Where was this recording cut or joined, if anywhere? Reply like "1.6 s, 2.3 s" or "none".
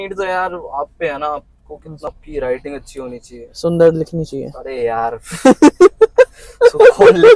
2.1 s